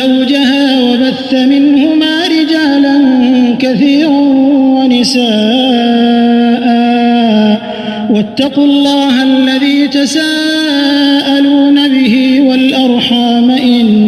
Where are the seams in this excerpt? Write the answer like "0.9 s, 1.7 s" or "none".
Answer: none